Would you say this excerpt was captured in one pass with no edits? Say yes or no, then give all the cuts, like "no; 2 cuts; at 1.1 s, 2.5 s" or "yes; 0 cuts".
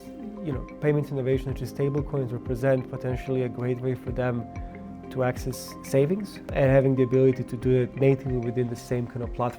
no; 2 cuts; at 6.5 s, 7.9 s